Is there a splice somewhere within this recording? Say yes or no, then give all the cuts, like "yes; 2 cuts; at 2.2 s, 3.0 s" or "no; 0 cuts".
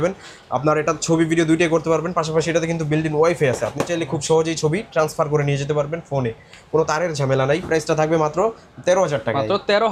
no; 0 cuts